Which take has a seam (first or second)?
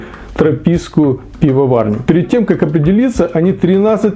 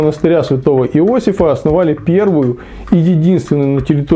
first